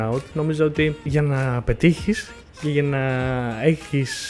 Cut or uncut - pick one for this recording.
cut